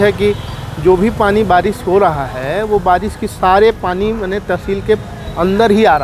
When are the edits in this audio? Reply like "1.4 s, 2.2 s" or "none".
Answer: none